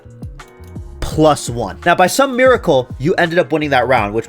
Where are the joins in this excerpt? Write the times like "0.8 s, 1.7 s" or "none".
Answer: 1.7 s